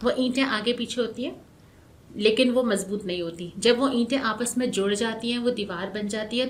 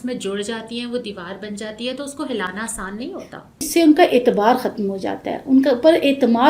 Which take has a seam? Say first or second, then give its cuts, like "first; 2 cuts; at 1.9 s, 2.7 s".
second; 1 cut; at 3.7 s